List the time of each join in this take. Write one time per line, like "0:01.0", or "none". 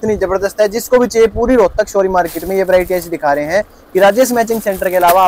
none